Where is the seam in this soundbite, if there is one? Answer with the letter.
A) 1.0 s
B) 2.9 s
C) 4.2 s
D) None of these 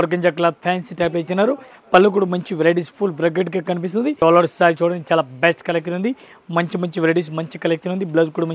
C